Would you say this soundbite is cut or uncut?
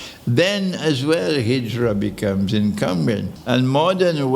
cut